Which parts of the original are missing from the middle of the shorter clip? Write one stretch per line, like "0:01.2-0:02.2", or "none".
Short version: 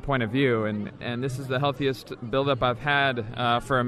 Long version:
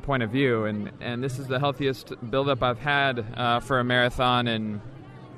none